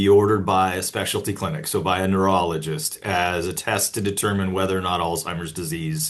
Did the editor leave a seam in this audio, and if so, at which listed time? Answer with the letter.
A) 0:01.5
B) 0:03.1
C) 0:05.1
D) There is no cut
D